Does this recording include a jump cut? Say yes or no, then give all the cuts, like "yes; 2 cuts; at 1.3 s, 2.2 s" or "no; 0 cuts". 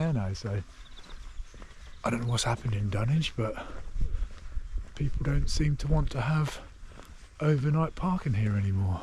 no; 0 cuts